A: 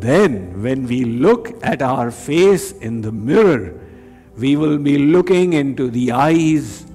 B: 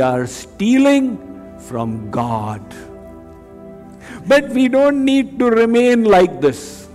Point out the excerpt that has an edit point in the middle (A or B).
B